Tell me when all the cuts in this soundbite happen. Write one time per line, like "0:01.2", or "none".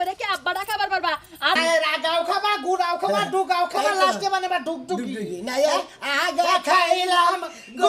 0:01.6